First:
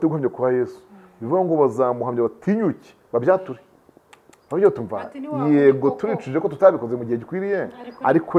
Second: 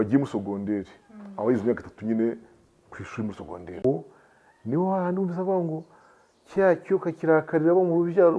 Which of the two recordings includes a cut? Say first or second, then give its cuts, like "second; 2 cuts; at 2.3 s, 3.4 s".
second; 1 cut; at 3.8 s